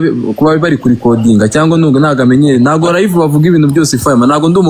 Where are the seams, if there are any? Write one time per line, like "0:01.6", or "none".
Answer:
none